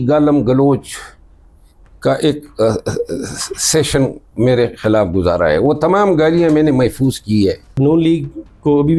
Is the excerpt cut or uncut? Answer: cut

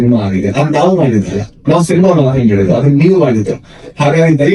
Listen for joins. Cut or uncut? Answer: uncut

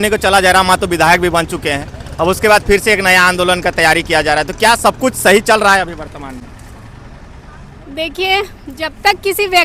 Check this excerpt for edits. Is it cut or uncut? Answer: uncut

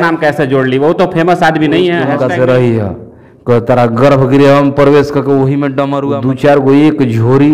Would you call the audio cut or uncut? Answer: cut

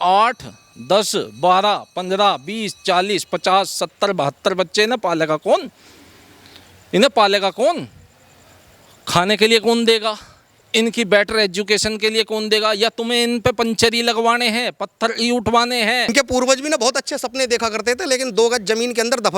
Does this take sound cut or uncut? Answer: cut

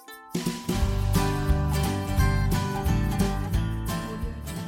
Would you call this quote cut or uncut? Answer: uncut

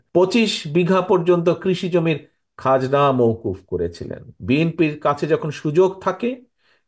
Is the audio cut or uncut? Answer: cut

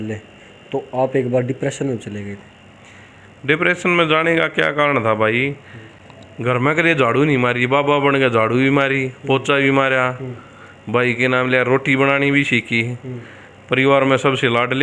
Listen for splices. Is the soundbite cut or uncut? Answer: uncut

